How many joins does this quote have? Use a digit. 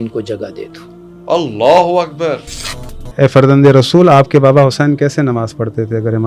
1